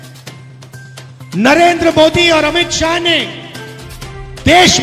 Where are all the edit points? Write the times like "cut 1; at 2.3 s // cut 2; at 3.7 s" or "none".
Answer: cut 1; at 0.9 s